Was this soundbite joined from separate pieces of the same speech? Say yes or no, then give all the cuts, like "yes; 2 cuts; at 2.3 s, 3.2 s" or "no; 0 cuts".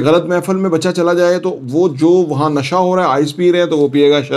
no; 0 cuts